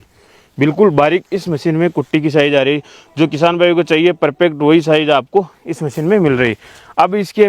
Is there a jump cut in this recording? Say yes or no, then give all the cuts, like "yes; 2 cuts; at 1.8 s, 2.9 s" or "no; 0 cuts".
no; 0 cuts